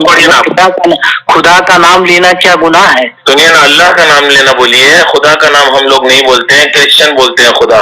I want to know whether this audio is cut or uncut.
uncut